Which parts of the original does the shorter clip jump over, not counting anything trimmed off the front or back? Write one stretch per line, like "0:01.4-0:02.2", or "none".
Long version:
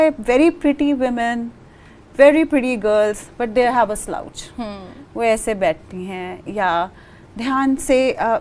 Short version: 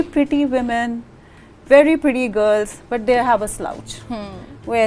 none